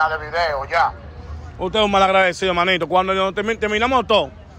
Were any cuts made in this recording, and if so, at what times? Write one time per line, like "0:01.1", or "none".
none